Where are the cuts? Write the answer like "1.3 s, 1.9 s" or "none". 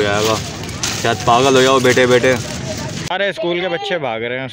3.1 s